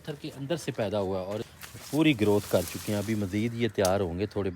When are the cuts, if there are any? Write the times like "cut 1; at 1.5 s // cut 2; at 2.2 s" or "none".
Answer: cut 1; at 1.5 s